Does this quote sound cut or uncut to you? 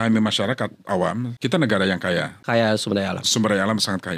cut